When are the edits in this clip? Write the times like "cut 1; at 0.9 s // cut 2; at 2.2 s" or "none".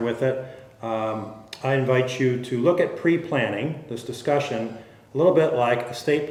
none